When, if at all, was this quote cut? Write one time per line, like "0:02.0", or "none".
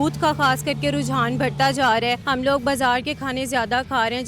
0:02.2